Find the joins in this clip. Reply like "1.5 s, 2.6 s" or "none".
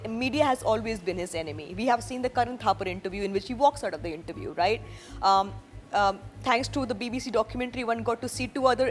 none